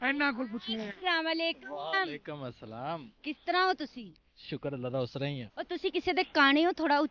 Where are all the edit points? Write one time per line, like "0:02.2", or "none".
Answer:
none